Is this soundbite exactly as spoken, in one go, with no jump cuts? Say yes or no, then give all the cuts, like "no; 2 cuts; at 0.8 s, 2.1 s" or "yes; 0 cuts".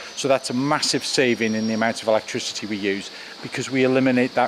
no; 1 cut; at 3.3 s